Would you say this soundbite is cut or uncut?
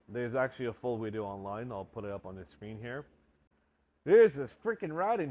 cut